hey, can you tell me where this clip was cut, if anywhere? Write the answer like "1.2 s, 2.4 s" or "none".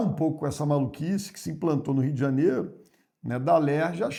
none